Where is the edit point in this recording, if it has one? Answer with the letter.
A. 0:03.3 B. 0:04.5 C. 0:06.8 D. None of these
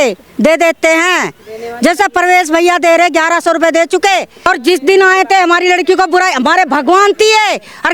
B